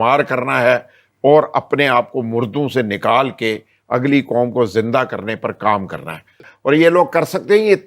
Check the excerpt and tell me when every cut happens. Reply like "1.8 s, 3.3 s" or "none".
6.5 s